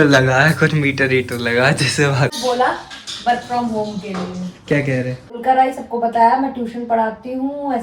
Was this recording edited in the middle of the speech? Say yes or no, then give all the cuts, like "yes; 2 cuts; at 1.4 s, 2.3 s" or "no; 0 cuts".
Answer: yes; 2 cuts; at 2.4 s, 5.4 s